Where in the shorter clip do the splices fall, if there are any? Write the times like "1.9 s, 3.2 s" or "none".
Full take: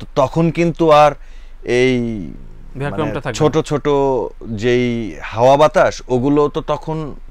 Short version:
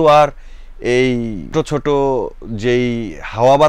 1.5 s

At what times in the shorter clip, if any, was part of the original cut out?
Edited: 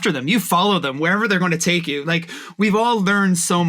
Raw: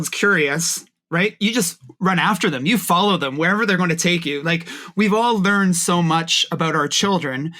none

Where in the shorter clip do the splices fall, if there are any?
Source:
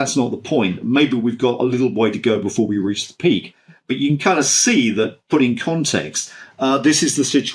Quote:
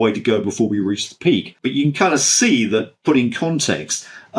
1.5 s

